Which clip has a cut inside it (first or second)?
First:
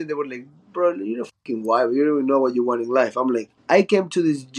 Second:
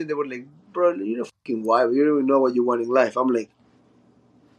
first